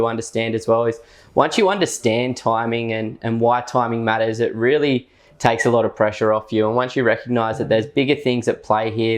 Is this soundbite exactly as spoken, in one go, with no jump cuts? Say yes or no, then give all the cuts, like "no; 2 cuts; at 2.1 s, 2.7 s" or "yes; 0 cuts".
yes; 0 cuts